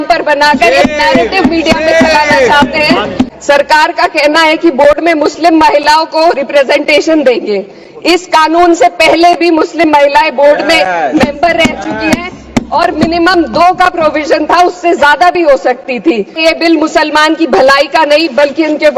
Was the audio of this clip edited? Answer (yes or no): yes